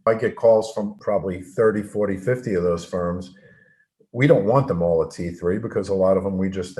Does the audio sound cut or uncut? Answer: cut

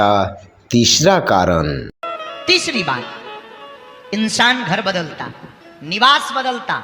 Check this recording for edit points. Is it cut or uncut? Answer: uncut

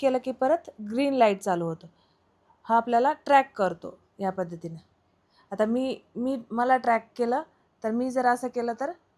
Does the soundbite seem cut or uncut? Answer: uncut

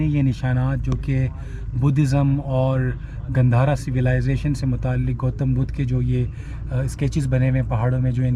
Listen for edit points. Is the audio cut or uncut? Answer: uncut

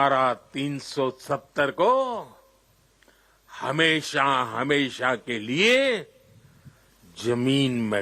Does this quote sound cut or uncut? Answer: uncut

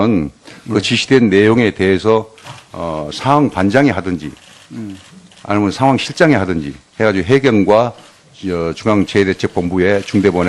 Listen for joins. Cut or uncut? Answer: uncut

